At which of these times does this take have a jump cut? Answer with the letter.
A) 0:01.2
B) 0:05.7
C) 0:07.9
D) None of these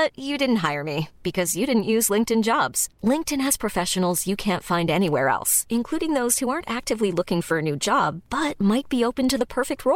D